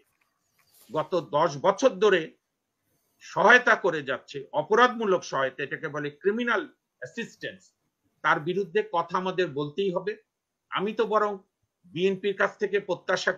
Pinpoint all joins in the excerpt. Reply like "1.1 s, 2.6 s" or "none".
none